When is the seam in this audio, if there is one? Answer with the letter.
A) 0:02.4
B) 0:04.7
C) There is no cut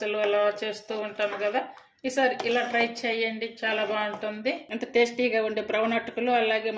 B